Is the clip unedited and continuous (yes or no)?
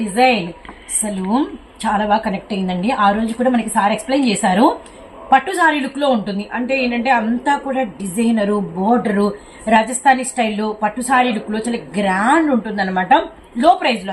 yes